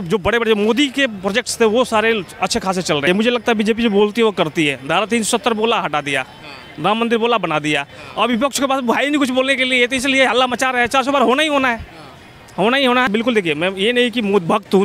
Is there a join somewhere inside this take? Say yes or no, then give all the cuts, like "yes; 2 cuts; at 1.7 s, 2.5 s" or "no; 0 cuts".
yes; 2 cuts; at 3.1 s, 13.1 s